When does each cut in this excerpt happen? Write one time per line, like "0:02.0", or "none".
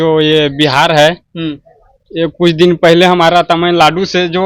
none